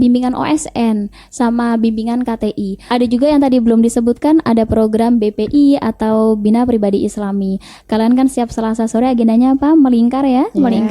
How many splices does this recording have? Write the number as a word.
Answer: one